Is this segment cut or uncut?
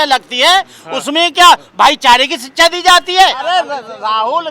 cut